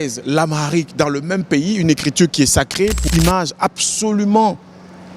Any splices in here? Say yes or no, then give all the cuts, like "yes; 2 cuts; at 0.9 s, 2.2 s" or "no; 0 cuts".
yes; 1 cut; at 3.0 s